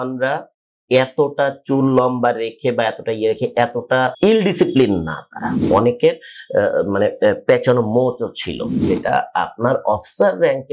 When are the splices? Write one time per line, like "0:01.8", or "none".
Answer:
0:04.1
0:05.6
0:08.8